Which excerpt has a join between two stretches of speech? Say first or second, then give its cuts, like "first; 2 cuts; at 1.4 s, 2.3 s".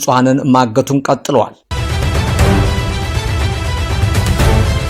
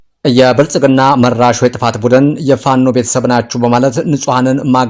first; 1 cut; at 1.6 s